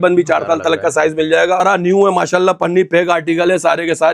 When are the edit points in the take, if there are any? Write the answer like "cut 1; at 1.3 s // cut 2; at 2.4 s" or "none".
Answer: cut 1; at 1.6 s